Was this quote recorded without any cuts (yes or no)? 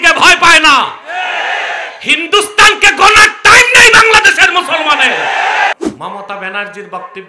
no